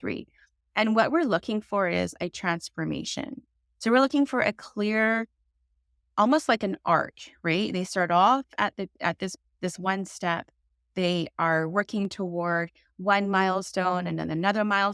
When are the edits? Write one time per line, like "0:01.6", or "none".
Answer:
none